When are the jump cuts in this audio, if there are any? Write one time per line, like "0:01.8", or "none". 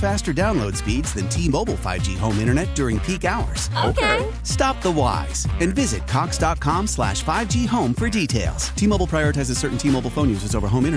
none